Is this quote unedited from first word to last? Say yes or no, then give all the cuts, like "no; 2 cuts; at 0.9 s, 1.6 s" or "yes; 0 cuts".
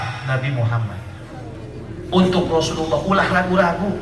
yes; 0 cuts